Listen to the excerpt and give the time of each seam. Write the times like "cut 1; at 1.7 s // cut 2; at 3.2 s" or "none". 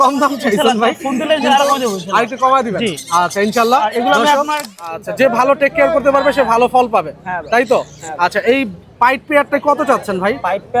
cut 1; at 4.9 s